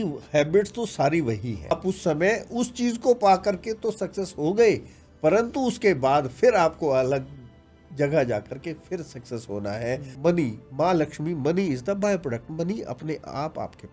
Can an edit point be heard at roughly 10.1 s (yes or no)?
yes